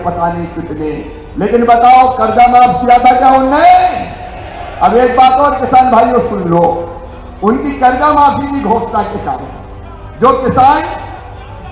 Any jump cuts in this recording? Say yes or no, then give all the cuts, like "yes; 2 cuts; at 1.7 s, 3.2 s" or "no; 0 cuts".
no; 0 cuts